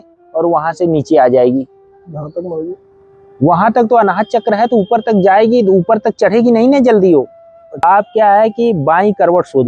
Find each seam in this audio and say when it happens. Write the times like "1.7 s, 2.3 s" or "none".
7.8 s